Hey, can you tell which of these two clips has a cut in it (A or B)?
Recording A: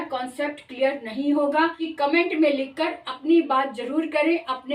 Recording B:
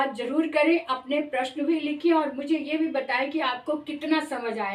A